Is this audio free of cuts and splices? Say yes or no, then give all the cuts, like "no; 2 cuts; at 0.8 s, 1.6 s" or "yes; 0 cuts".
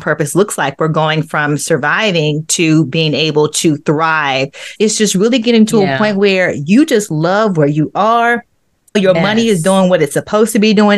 no; 2 cuts; at 4.7 s, 9.0 s